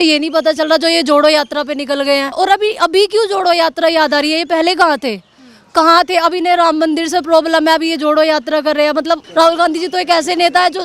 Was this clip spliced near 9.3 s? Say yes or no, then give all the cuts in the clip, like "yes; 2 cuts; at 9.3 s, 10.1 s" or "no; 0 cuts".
yes; 2 cuts; at 2.3 s, 9.3 s